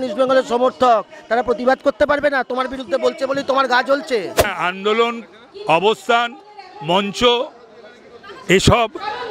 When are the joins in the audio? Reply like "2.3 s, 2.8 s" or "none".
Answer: 4.5 s